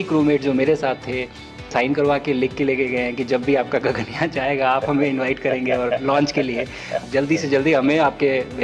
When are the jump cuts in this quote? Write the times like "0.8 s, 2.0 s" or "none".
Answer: 1.7 s, 7.0 s